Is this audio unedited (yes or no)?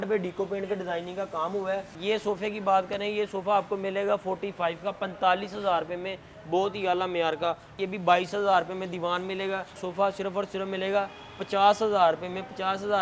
no